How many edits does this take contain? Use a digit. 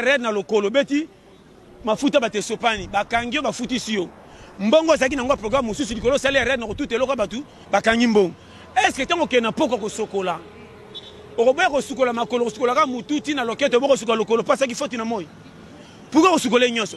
0